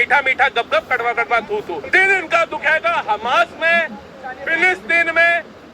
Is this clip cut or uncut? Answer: cut